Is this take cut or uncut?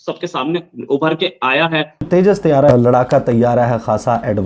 cut